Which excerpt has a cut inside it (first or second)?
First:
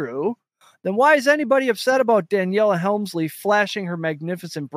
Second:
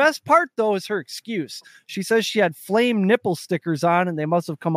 first